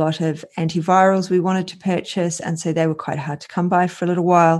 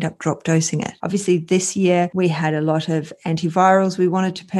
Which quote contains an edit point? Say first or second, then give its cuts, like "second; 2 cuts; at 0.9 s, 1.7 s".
second; 1 cut; at 0.9 s